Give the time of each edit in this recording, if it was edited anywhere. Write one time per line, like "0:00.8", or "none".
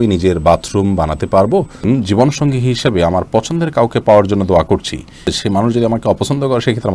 0:01.8
0:05.4